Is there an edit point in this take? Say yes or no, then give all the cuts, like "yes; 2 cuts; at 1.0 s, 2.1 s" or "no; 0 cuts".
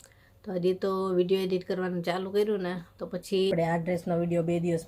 yes; 1 cut; at 3.5 s